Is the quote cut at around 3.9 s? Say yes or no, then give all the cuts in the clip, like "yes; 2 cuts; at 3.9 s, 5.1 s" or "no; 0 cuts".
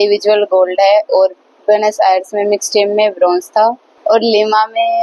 yes; 1 cut; at 3.9 s